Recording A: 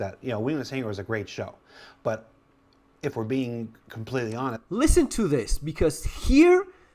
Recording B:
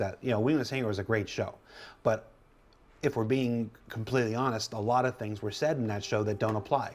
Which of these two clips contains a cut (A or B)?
B